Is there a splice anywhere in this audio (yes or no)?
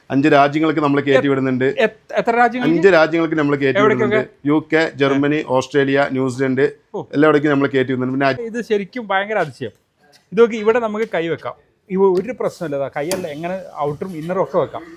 yes